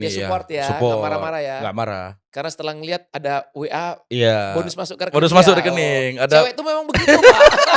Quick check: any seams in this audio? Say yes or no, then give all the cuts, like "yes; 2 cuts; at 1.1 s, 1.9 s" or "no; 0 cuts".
no; 0 cuts